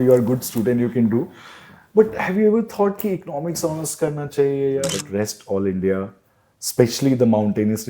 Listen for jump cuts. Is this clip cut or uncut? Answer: cut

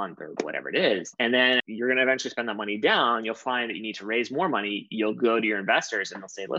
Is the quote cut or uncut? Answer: cut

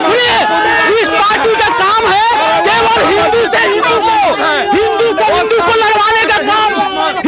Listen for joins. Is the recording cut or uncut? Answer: uncut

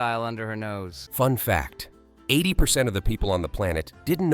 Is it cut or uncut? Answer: cut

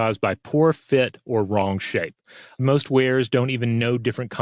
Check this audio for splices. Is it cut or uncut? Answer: cut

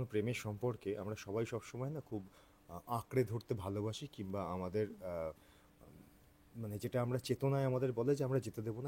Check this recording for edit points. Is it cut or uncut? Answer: uncut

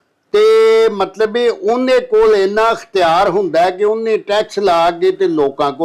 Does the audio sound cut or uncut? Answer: uncut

